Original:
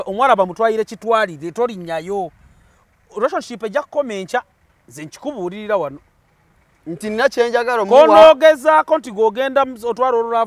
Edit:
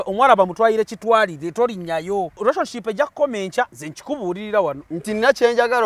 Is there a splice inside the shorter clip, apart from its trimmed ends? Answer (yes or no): yes